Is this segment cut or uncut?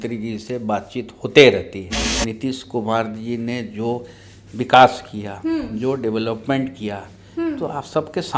cut